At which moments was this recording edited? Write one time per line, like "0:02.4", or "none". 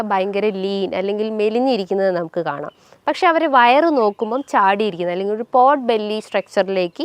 none